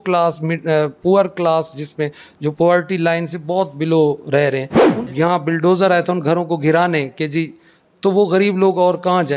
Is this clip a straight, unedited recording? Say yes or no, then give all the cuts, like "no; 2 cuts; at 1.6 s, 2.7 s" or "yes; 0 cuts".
no; 1 cut; at 4.8 s